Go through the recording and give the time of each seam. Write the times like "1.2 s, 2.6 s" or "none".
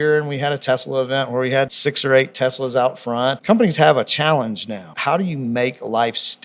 1.8 s, 3.4 s, 4.9 s